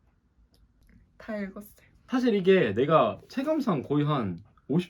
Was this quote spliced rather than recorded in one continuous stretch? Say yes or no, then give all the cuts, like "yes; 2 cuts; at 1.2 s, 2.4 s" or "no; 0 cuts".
no; 0 cuts